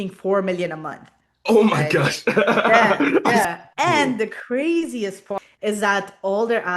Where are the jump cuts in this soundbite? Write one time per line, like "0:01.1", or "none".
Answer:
0:03.4
0:05.4